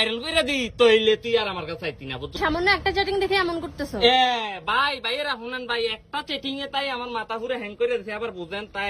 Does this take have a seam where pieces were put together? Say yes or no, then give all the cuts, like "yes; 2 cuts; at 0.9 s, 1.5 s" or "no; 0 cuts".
yes; 1 cut; at 2.4 s